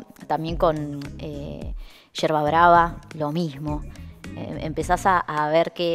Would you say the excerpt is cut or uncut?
uncut